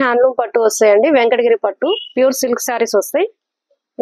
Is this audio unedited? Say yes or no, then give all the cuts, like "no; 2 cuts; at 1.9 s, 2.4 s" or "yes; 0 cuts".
yes; 0 cuts